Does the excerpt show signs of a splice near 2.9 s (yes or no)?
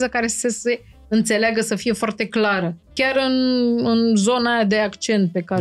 yes